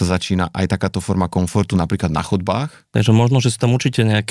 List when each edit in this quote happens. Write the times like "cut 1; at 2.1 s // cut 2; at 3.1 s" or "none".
cut 1; at 2.8 s